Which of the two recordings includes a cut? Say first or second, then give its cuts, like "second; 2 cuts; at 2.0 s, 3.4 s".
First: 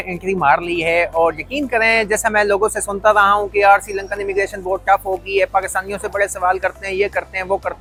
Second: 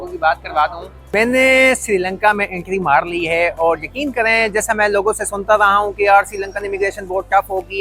second; 1 cut; at 0.9 s